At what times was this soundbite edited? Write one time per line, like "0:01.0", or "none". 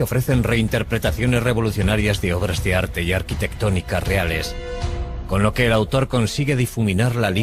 0:06.3